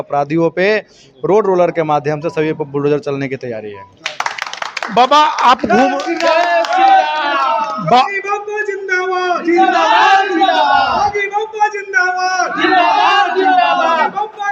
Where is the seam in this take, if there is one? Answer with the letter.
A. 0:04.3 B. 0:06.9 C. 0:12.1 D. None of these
D